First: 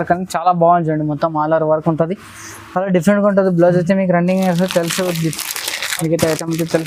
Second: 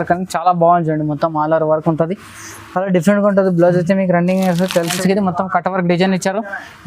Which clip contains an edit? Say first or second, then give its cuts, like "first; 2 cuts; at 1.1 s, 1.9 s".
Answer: second; 1 cut; at 5.0 s